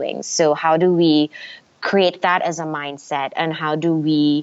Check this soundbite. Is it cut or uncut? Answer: uncut